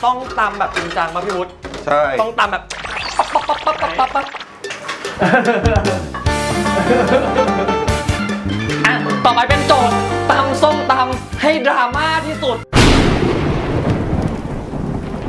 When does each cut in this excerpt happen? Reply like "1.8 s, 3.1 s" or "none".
none